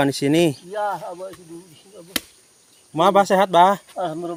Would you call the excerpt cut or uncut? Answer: uncut